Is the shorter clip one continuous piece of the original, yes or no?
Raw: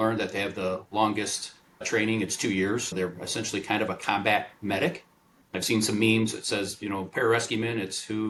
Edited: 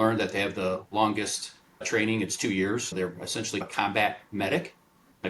no